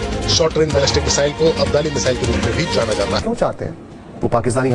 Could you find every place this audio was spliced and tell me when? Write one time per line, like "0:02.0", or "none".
0:03.2